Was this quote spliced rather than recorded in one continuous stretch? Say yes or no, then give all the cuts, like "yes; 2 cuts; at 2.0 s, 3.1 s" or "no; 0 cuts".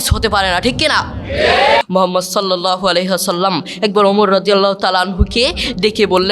yes; 1 cut; at 1.8 s